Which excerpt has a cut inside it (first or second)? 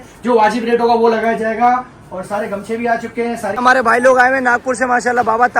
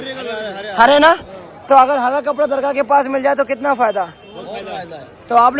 first